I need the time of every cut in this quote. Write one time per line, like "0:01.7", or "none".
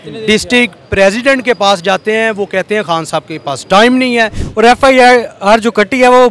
0:04.4